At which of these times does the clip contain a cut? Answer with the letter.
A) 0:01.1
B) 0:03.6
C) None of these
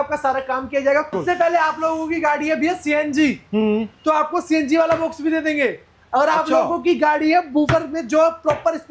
A